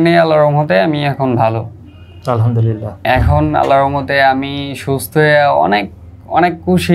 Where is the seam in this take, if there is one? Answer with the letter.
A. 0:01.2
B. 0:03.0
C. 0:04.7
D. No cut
B